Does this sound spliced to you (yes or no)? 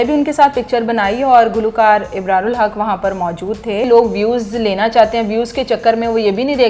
yes